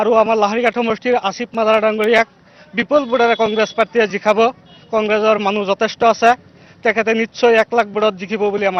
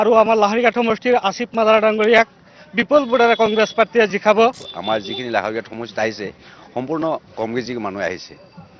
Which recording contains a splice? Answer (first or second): second